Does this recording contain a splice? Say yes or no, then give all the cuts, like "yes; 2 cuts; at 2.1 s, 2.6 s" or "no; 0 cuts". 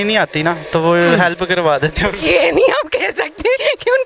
no; 0 cuts